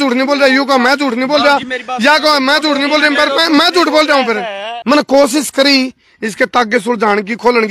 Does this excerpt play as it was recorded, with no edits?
no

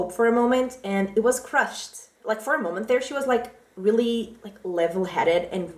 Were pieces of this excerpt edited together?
yes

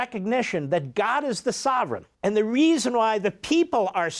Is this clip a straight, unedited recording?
no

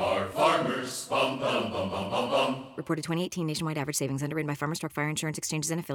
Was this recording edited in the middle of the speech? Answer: no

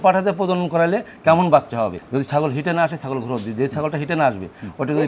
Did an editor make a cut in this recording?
yes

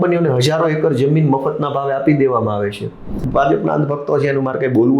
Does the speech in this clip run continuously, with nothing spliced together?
no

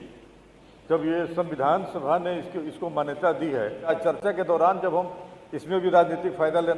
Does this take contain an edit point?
yes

